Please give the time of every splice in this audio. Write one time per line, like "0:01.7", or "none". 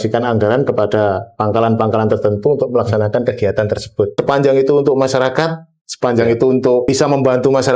0:04.2
0:06.8